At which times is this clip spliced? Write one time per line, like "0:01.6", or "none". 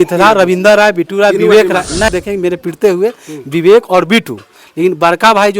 0:02.1

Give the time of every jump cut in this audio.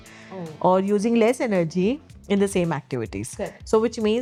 none

